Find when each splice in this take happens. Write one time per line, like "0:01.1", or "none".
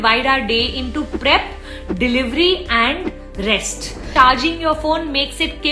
0:04.1

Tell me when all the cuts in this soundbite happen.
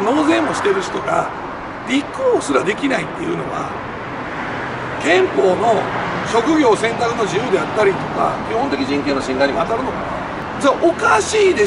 0:10.4

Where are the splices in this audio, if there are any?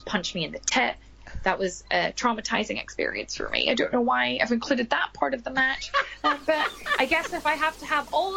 0:01.1

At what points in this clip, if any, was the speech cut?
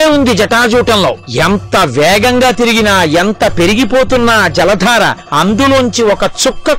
0:01.2
0:05.2

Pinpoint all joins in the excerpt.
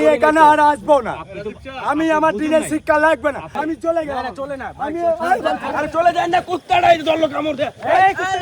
0:03.5
0:05.7

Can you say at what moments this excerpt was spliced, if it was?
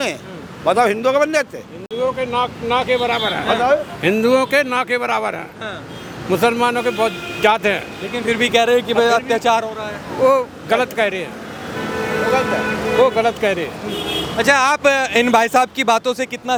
none

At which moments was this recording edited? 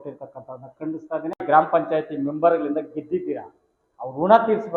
0:01.4

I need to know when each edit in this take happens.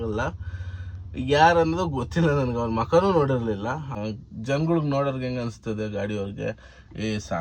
0:03.9

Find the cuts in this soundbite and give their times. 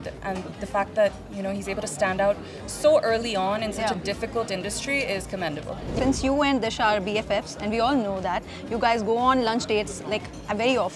0:05.9

